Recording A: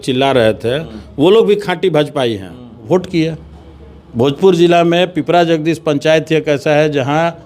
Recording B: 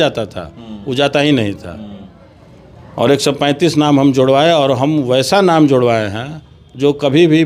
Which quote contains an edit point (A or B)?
A